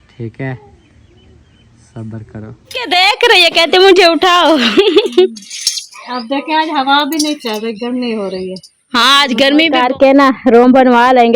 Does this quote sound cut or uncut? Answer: cut